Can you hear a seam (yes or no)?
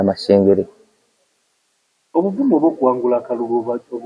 no